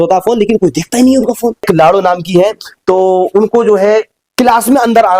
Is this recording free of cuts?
no; 2 cuts; at 1.6 s, 4.2 s

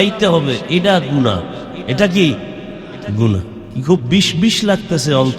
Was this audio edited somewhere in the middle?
yes; 2 cuts; at 1.8 s, 3.6 s

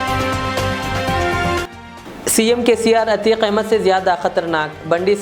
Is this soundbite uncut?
no; 1 cut; at 1.6 s

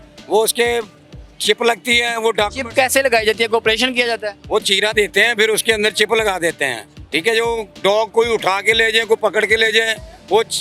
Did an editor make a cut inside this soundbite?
no; 0 cuts

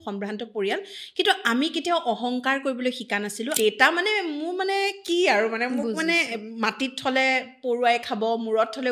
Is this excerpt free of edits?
no; 1 cut; at 3.6 s

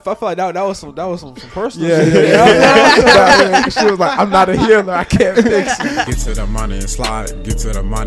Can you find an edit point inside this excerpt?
yes; 1 cut; at 6.1 s

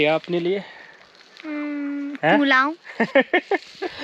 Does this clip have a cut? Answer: no; 0 cuts

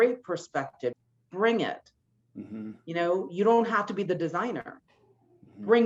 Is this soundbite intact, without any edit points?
no; 1 cut; at 0.9 s

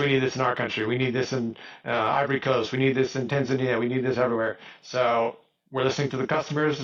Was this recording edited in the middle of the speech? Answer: no; 0 cuts

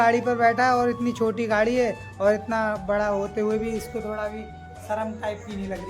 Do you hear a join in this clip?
no; 0 cuts

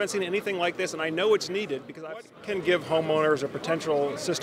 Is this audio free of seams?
no; 1 cut; at 2.3 s

